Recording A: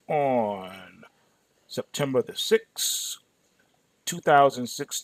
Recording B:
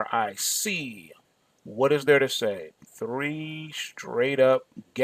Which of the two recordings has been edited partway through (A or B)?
B